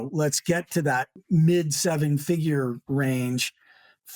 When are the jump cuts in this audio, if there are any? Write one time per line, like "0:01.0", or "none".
none